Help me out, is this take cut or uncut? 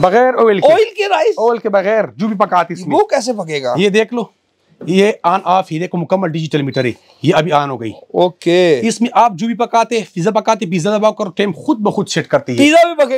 uncut